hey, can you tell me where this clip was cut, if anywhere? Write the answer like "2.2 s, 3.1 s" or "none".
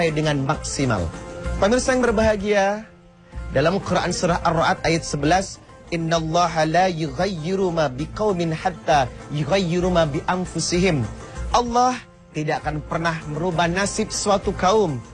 1.8 s